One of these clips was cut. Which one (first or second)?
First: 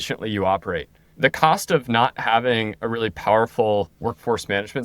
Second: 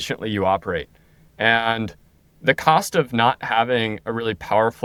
first